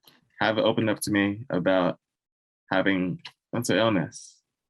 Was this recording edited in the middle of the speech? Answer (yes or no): no